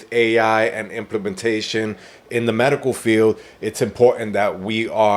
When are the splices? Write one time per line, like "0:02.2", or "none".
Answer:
none